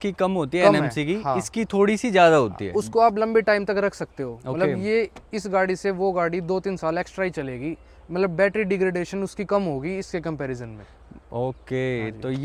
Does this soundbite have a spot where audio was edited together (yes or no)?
no